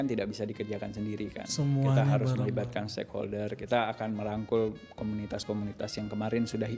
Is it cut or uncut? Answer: uncut